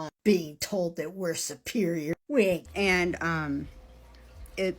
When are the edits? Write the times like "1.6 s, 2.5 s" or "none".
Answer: 2.7 s